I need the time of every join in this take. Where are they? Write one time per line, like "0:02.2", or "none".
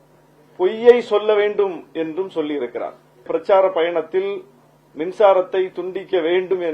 0:03.3